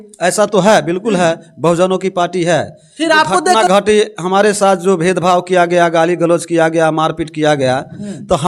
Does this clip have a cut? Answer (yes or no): yes